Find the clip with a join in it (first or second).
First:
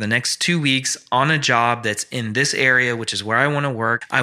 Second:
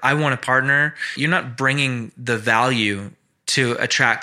second